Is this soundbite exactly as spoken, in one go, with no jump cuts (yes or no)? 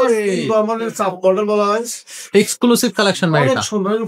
yes